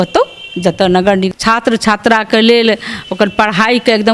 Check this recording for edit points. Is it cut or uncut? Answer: cut